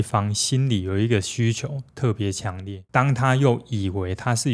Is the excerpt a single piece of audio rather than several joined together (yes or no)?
no